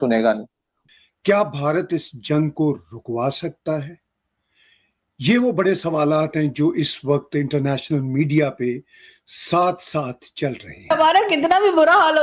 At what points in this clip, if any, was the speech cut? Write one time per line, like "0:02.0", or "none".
0:00.9